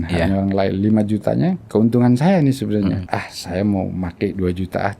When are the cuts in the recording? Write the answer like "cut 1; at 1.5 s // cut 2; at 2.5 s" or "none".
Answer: cut 1; at 1.6 s // cut 2; at 3.0 s

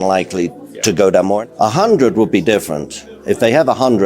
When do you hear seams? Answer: cut 1; at 1.4 s

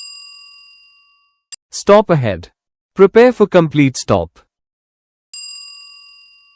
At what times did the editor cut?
cut 1; at 1.2 s

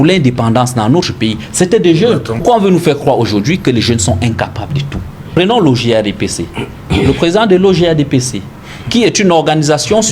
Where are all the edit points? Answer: cut 1; at 2.4 s // cut 2; at 5.3 s

